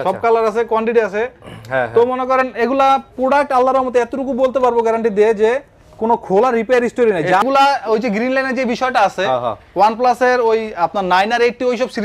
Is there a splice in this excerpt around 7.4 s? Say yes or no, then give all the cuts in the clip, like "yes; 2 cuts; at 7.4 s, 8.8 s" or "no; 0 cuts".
yes; 1 cut; at 7.4 s